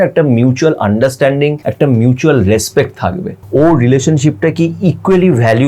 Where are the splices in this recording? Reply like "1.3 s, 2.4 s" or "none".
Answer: 1.6 s, 3.4 s

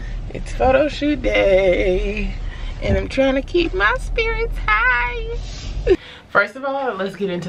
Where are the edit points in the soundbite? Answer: 6.0 s

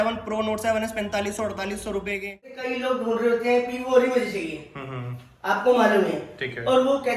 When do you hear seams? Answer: 2.6 s

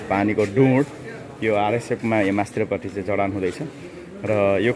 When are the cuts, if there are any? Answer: none

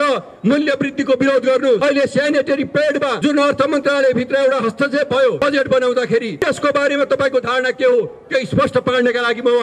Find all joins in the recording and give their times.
1.8 s, 3.1 s, 5.4 s, 6.3 s

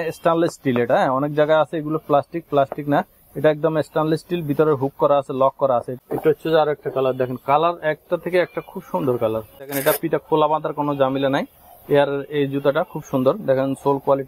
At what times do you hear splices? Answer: 6.0 s, 9.6 s

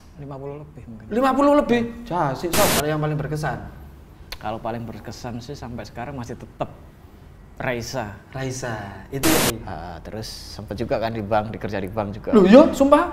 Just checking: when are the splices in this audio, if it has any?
2.7 s, 9.4 s

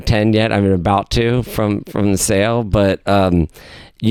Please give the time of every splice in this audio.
none

